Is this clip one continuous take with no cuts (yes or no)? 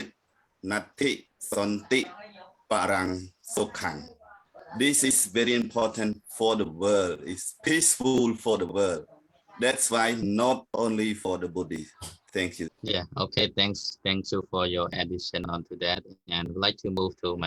no